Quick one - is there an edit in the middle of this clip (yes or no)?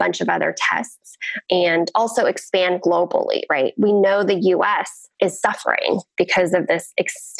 yes